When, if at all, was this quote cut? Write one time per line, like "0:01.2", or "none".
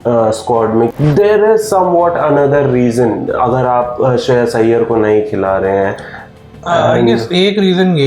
0:00.9